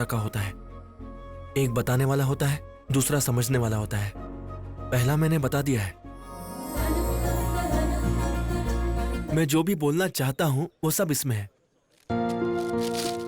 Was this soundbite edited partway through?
yes; 2 cuts; at 6.5 s, 9.2 s

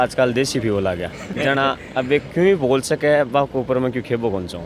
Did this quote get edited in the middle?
no; 0 cuts

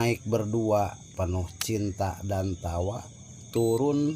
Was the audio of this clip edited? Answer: yes; 1 cut; at 1.0 s

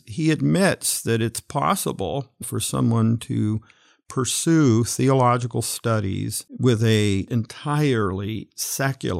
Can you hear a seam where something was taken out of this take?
yes; 3 cuts; at 2.4 s, 6.4 s, 7.3 s

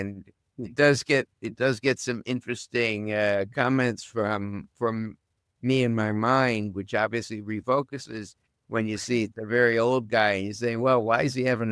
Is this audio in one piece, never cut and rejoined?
yes; 0 cuts

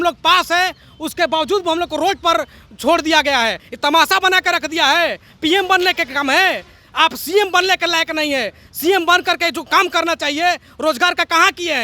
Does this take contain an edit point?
yes; 1 cut; at 3.7 s

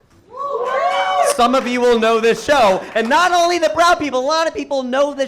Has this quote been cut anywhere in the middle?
no; 0 cuts

